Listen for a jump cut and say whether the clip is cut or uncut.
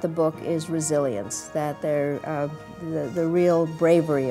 uncut